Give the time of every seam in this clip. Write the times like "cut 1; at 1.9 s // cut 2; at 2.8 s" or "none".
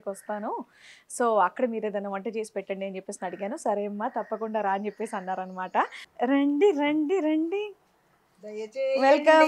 cut 1; at 6.0 s